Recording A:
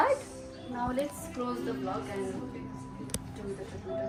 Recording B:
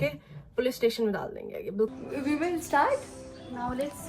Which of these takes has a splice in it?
B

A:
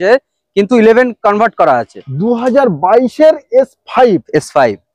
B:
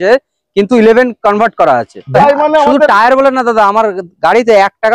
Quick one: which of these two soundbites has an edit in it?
B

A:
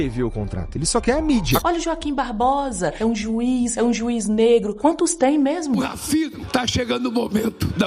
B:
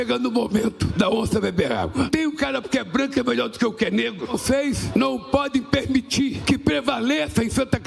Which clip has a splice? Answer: A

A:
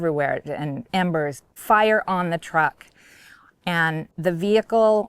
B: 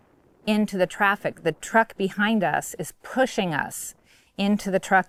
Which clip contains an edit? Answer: A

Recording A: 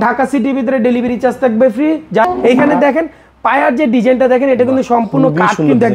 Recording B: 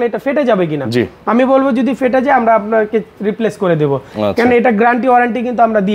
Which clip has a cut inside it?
A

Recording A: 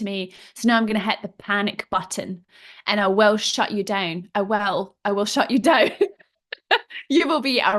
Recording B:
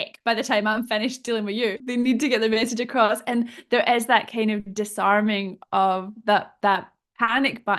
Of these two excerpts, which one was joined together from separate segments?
B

